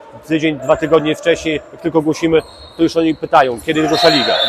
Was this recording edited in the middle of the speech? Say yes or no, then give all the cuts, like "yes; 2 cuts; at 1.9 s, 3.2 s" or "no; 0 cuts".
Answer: no; 0 cuts